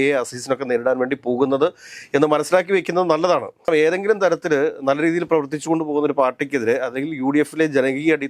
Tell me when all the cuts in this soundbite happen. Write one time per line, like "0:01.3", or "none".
none